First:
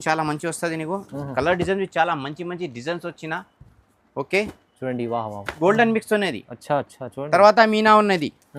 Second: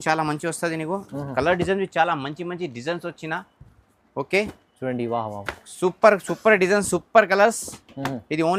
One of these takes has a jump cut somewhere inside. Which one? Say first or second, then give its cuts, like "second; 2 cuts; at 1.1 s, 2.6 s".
first; 1 cut; at 5.5 s